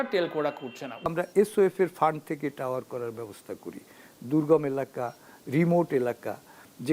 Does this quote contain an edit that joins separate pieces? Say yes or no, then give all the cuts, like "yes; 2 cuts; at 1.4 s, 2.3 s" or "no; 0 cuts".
yes; 1 cut; at 1.1 s